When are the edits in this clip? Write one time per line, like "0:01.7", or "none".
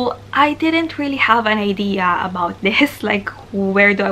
none